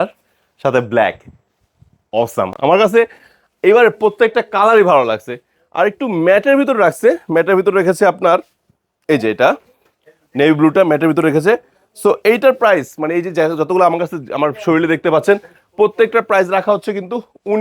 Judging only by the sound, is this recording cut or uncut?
uncut